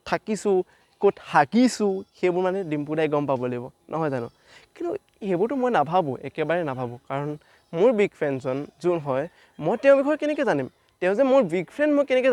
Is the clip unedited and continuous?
yes; 0 cuts

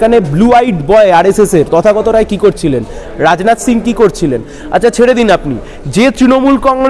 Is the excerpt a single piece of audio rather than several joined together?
yes; 0 cuts

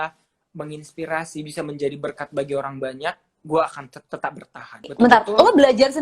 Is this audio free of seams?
no; 1 cut; at 4.9 s

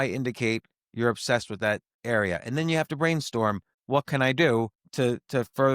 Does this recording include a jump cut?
yes; 3 cuts; at 1.9 s, 3.7 s, 4.8 s

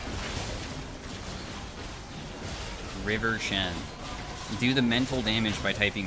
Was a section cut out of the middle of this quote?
no; 0 cuts

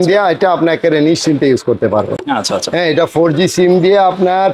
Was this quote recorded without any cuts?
yes; 0 cuts

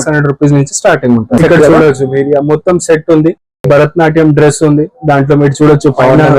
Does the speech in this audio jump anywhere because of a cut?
yes; 2 cuts; at 1.4 s, 3.6 s

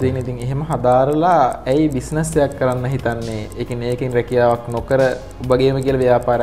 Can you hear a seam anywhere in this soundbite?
no; 0 cuts

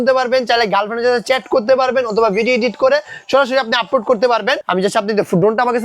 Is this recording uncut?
no; 1 cut; at 4.6 s

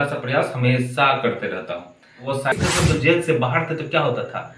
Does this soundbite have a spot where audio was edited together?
yes; 1 cut; at 2.5 s

